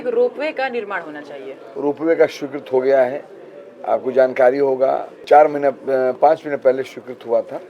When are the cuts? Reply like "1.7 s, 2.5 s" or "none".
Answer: 5.1 s